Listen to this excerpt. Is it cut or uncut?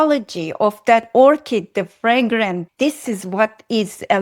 cut